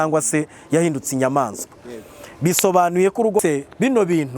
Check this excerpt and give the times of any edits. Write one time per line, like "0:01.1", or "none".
0:03.4